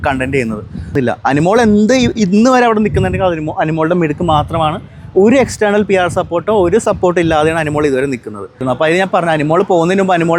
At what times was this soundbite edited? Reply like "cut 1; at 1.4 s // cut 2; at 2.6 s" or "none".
cut 1; at 0.9 s // cut 2; at 8.6 s